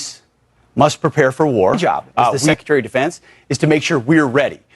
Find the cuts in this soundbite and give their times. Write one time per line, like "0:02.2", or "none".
0:02.5

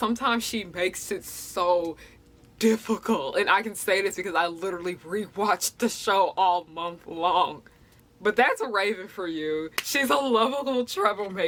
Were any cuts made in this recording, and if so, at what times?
none

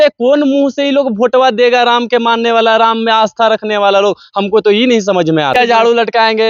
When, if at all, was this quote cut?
0:05.5

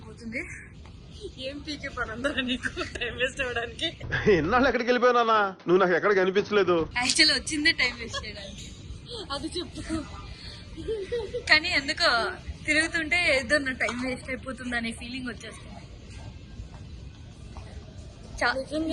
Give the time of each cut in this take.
none

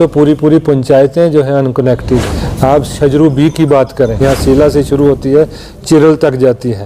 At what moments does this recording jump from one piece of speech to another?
0:02.4
0:04.2

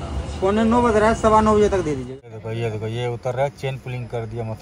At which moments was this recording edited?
0:02.0

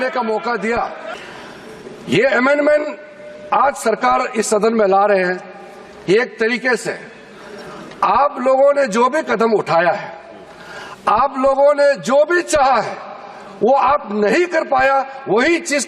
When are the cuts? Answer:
0:01.1

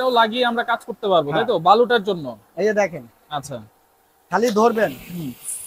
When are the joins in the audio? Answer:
none

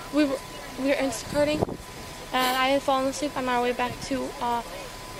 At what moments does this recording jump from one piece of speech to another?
none

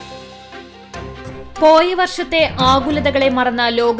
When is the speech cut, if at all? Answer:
none

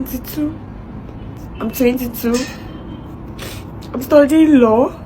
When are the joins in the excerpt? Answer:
0:01.4

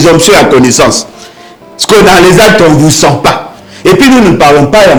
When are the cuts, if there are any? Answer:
none

